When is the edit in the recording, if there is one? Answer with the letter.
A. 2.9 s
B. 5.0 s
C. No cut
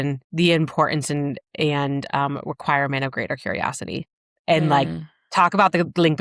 C